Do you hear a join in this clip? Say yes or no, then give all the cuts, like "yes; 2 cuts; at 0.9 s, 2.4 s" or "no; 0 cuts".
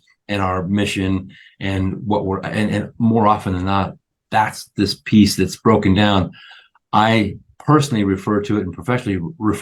no; 0 cuts